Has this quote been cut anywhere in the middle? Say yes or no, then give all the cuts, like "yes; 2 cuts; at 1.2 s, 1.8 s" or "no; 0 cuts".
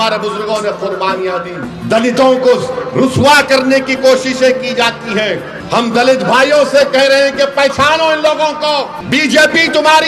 yes; 3 cuts; at 1.7 s, 5.5 s, 9.0 s